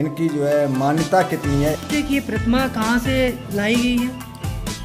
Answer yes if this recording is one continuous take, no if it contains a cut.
no